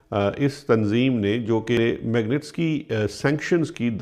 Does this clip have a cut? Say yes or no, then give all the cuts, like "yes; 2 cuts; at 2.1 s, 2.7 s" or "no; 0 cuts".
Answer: yes; 1 cut; at 1.8 s